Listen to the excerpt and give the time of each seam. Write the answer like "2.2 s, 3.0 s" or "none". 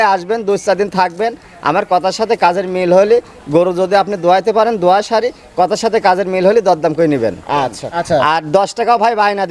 7.9 s